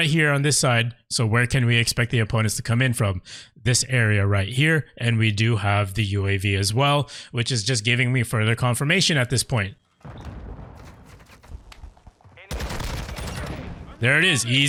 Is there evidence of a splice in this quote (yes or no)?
no